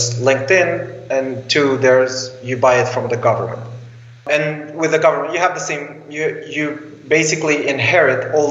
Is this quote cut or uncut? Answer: cut